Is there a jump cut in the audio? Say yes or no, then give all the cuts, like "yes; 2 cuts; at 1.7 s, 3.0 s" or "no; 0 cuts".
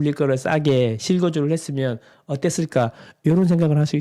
no; 0 cuts